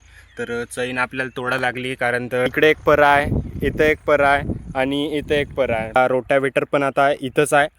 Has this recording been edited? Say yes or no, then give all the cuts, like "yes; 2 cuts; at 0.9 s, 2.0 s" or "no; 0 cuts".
yes; 2 cuts; at 2.5 s, 6.0 s